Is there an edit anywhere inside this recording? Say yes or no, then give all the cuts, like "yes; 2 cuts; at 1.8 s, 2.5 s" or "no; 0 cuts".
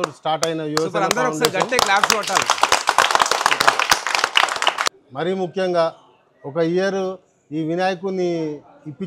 yes; 1 cut; at 4.8 s